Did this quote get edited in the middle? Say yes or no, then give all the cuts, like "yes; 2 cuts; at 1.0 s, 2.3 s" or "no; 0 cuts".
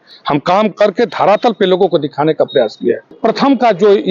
yes; 1 cut; at 3.1 s